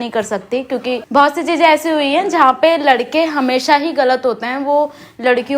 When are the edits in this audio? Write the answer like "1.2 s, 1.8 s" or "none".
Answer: 1.0 s

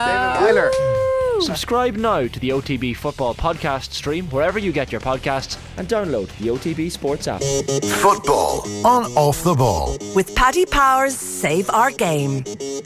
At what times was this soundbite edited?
7.4 s

